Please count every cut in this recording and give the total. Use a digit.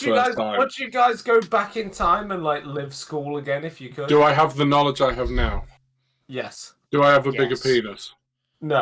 0